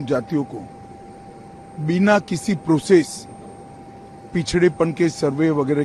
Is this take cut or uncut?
uncut